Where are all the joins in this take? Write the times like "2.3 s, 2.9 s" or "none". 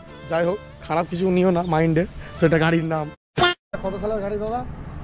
3.8 s